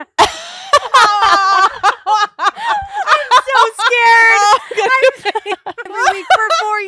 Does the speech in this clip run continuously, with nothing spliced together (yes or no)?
no